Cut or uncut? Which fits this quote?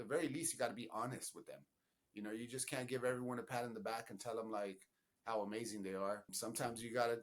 cut